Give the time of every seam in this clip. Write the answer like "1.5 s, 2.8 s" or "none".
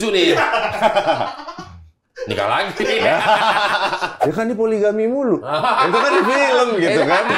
4.1 s